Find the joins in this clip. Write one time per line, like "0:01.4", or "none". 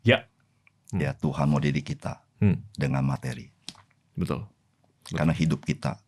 none